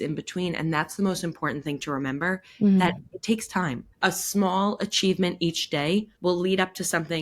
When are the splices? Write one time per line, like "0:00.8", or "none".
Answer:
0:03.8
0:06.1